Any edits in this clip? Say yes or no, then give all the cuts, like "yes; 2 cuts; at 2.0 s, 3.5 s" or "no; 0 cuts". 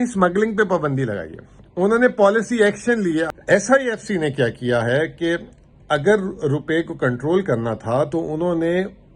yes; 1 cut; at 3.3 s